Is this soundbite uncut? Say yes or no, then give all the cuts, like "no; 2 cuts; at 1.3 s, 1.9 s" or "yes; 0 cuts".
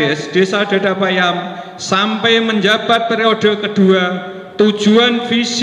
yes; 0 cuts